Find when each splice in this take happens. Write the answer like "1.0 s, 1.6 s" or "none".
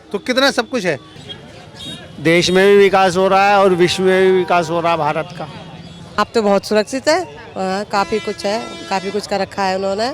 1.1 s, 6.1 s